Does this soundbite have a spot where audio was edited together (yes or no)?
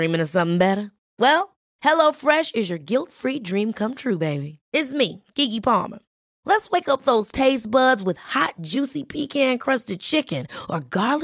no